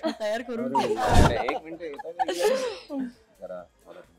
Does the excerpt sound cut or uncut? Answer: cut